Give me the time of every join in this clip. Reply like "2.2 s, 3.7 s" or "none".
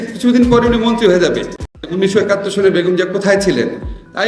1.9 s